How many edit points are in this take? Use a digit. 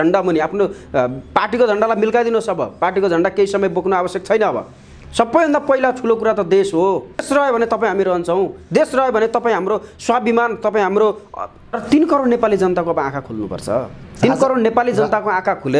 2